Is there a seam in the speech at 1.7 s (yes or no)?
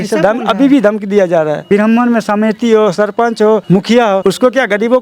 yes